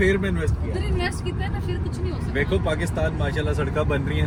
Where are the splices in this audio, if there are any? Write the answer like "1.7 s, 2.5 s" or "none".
none